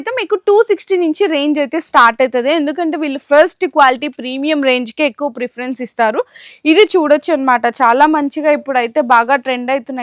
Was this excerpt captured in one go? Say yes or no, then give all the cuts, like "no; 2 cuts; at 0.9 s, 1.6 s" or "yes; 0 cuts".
yes; 0 cuts